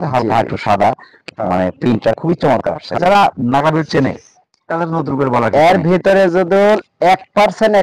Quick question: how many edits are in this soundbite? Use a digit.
1